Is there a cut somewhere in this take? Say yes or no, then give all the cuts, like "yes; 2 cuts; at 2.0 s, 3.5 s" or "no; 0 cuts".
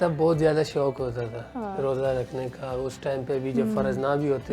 no; 0 cuts